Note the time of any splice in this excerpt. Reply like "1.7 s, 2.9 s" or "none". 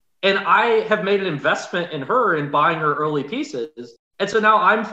none